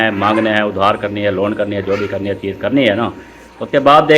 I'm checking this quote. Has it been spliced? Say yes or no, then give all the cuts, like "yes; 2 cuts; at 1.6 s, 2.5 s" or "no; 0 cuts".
no; 0 cuts